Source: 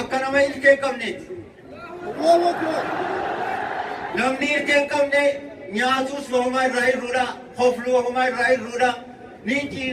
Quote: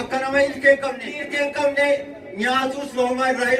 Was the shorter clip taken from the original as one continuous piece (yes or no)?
no